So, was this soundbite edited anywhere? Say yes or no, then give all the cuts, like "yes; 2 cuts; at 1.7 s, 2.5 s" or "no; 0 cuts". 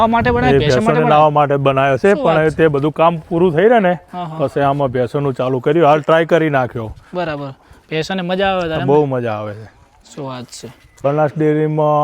yes; 1 cut; at 11.0 s